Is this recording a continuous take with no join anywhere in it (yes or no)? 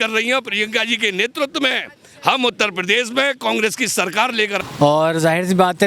no